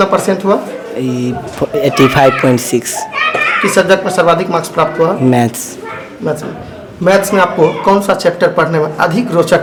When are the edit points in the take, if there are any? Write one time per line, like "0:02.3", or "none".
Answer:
none